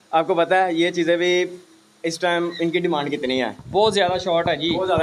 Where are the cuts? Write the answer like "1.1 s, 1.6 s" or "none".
none